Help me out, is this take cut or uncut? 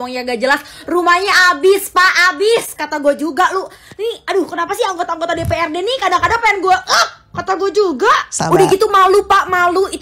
uncut